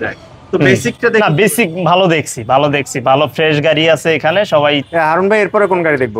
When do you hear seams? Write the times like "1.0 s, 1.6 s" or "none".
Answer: 4.9 s